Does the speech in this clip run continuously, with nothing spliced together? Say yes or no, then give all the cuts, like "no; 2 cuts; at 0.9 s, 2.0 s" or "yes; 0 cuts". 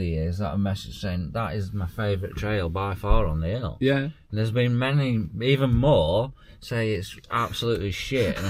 yes; 0 cuts